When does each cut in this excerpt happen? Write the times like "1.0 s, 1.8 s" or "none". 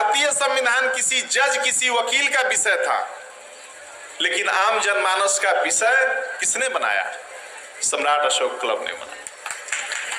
none